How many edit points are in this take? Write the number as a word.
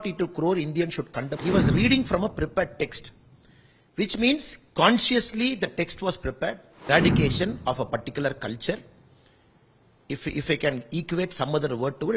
two